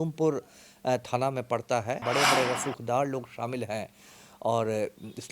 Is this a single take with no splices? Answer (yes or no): no